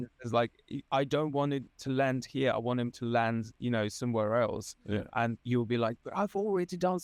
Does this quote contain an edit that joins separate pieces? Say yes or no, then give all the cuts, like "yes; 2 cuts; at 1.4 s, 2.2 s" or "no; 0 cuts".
no; 0 cuts